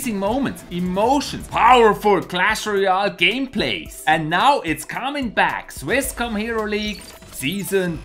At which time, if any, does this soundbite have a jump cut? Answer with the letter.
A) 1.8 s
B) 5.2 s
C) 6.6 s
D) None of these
C